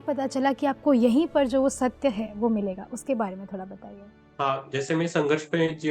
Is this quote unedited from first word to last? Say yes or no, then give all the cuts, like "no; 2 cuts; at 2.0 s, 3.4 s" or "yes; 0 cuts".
yes; 0 cuts